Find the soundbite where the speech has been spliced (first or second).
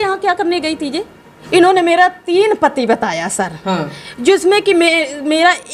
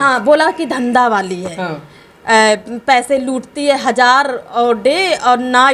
first